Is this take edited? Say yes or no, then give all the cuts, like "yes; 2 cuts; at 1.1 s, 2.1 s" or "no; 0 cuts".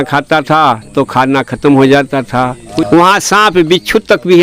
yes; 1 cut; at 2.7 s